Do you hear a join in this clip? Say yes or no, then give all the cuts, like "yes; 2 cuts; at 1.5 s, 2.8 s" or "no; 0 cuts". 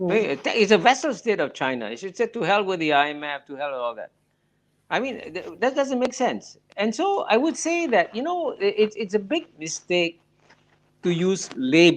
no; 0 cuts